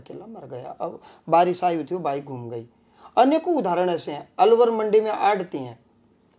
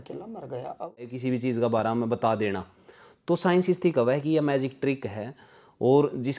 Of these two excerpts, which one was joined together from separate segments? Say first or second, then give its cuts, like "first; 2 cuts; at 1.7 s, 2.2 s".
second; 1 cut; at 1.1 s